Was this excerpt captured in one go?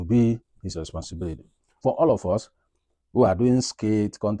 no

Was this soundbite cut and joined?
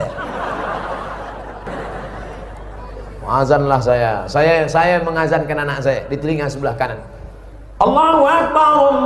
yes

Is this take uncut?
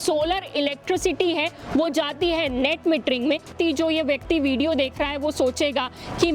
no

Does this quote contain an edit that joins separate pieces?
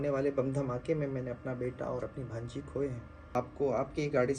yes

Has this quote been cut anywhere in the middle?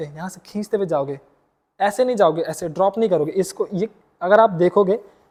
no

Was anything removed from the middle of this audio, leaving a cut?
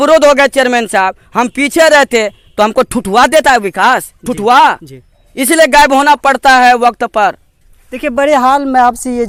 no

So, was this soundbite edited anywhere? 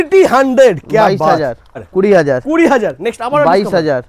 yes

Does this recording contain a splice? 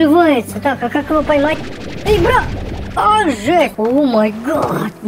yes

